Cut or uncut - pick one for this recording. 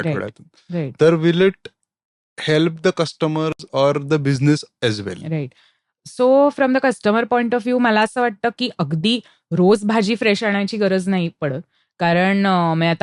uncut